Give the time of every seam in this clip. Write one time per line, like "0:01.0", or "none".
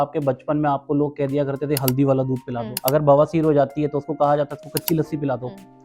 0:02.7